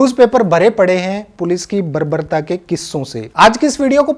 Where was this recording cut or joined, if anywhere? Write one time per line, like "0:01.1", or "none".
0:03.2